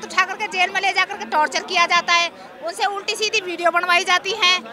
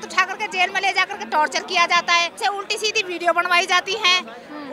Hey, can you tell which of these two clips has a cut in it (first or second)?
second